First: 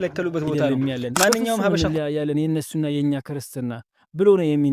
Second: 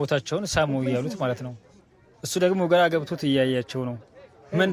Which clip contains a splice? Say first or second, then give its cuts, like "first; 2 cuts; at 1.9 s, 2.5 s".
first; 1 cut; at 1.7 s